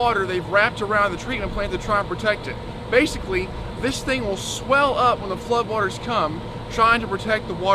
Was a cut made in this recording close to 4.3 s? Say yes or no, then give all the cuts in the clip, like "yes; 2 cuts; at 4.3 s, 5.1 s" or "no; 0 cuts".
no; 0 cuts